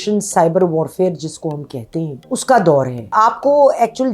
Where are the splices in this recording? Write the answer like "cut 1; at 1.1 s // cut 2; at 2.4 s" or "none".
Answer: cut 1; at 2.3 s // cut 2; at 3.1 s